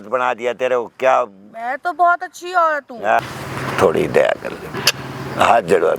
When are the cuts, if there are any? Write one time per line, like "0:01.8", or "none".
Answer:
0:03.2